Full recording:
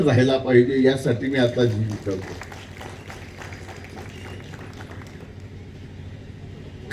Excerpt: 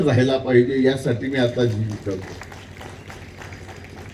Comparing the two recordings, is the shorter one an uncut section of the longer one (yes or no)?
yes